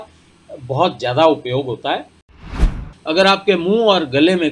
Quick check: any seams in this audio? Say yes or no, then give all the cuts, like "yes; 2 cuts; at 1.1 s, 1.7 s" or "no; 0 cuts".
yes; 1 cut; at 2.6 s